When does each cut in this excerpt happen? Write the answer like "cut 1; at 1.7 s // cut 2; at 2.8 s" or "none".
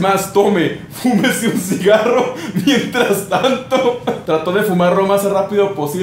cut 1; at 4.2 s